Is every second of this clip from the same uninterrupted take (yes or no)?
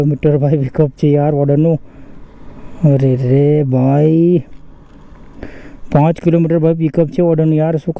yes